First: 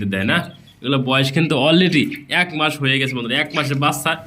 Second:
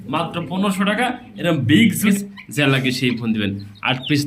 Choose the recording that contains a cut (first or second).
second